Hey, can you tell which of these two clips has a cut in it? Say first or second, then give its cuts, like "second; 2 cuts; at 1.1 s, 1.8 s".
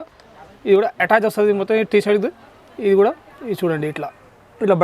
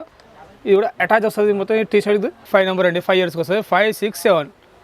second; 1 cut; at 2.4 s